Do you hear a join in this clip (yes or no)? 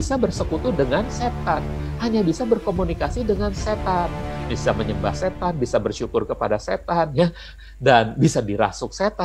yes